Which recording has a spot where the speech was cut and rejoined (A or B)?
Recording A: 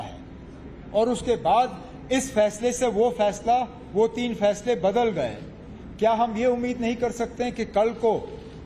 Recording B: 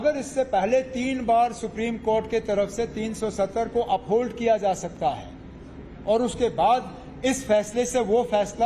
A